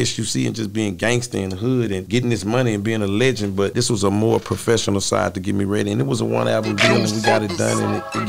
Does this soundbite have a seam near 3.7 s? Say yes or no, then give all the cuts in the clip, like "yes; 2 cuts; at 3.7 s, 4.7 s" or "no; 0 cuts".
yes; 2 cuts; at 2.0 s, 3.7 s